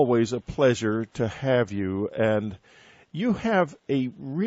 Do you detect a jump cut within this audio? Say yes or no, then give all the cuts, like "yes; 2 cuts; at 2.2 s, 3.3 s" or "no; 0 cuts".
no; 0 cuts